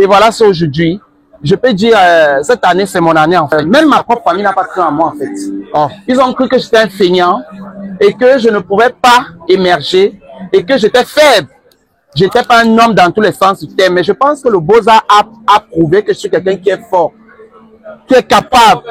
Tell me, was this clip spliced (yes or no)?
yes